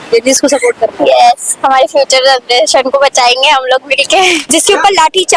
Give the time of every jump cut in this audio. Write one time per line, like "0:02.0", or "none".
0:04.4